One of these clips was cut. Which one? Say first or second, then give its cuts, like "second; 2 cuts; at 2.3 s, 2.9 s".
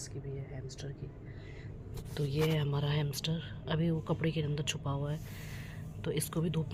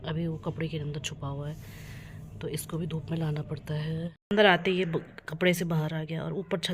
second; 1 cut; at 4.2 s